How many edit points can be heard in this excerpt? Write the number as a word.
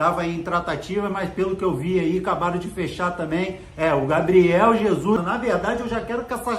one